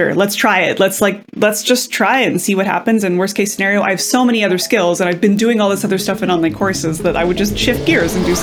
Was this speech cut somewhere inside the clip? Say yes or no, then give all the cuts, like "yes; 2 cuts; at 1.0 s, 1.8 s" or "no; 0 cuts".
no; 0 cuts